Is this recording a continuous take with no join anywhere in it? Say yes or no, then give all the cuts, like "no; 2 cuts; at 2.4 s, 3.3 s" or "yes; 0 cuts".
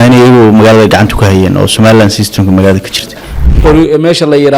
no; 1 cut; at 3.3 s